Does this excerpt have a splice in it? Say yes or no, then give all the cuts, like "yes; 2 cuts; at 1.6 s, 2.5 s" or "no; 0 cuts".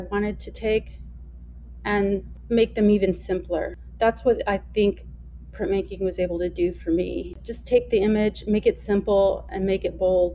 yes; 3 cuts; at 2.3 s, 3.8 s, 7.4 s